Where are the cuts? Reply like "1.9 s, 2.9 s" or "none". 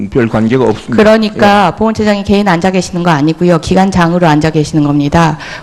none